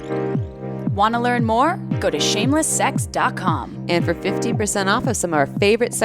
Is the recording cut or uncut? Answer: cut